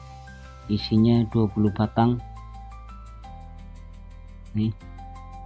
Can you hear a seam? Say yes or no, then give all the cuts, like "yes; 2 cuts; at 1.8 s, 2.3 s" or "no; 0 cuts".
yes; 2 cuts; at 2.6 s, 4.3 s